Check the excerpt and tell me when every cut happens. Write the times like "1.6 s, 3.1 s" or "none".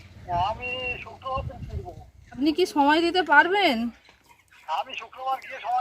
2.4 s

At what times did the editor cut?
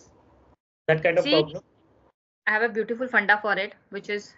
none

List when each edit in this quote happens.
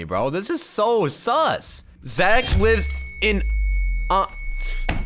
none

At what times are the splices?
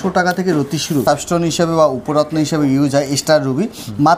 1.0 s

